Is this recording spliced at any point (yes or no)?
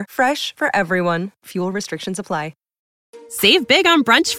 no